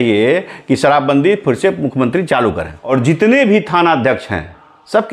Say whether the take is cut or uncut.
cut